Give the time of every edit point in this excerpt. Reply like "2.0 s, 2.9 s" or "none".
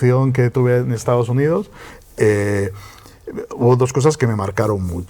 none

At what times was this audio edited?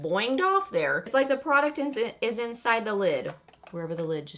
1.0 s

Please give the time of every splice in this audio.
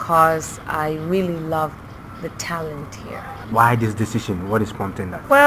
none

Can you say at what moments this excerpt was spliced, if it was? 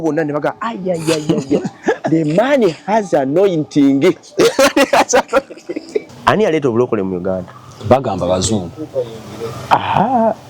6.1 s

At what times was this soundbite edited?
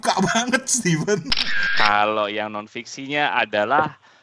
1.6 s

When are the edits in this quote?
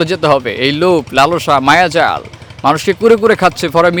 none

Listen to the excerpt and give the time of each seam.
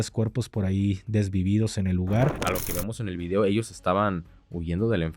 2.4 s

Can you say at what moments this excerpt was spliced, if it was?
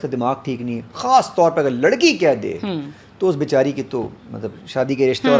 none

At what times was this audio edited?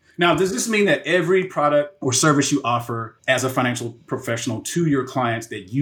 1.9 s, 3.1 s

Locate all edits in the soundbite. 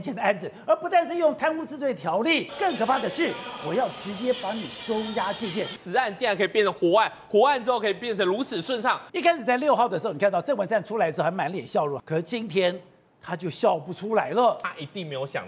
2.5 s, 5.8 s, 9.1 s, 12.0 s, 14.6 s

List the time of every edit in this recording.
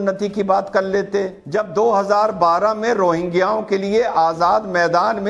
1.4 s

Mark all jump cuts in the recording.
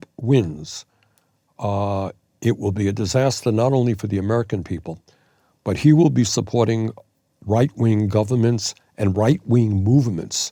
none

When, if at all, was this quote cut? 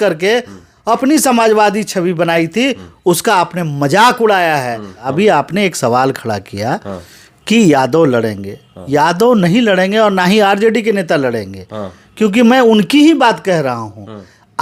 5.1 s

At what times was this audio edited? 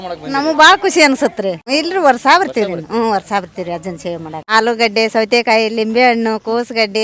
1.6 s, 4.4 s

